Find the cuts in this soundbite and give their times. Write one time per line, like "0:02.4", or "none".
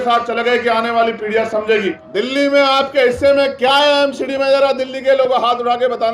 0:01.9